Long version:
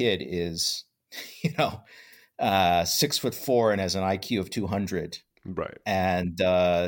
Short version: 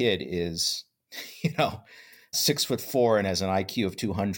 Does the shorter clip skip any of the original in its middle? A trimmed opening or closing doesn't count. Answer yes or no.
yes